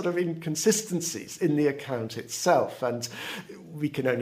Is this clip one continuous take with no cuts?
yes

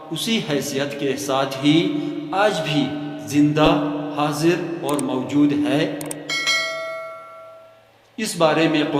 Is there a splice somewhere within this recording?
no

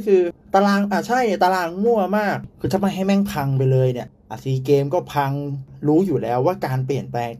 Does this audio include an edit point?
yes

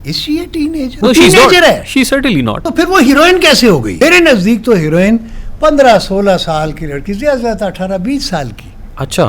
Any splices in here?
yes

